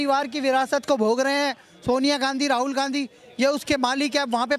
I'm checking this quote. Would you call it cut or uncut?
uncut